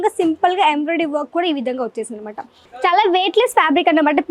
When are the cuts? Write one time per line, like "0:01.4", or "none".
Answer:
0:02.7